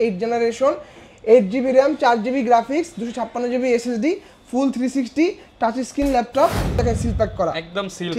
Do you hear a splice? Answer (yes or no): yes